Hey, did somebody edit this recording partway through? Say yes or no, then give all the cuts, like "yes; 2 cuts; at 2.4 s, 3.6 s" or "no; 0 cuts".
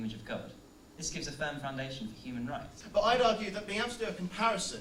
yes; 1 cut; at 2.8 s